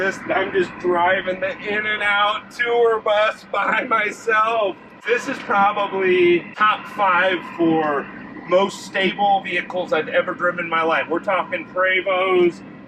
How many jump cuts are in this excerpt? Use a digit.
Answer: 2